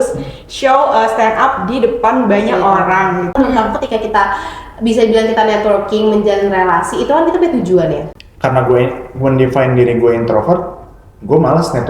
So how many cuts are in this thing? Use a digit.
2